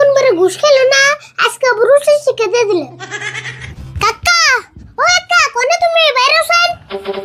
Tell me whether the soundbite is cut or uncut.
cut